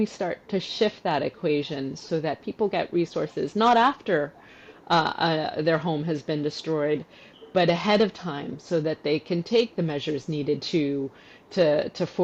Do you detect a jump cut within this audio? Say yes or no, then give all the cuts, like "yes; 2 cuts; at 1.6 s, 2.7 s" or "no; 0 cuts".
no; 0 cuts